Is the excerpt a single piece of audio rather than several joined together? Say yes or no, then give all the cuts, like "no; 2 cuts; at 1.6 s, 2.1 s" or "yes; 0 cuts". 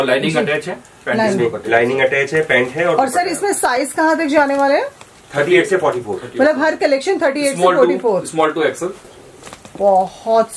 yes; 0 cuts